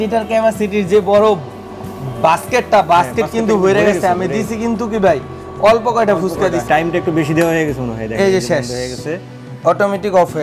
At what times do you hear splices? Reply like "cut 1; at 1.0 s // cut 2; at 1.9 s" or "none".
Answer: none